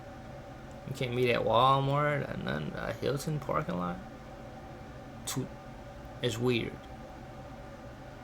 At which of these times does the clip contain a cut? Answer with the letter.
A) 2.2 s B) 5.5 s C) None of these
B